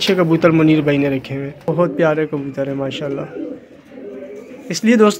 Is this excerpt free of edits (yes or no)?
no